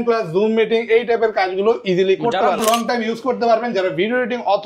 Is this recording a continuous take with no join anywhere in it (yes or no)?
no